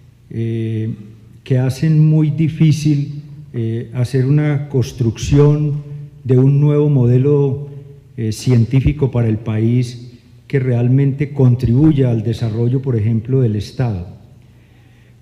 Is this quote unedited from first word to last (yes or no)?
no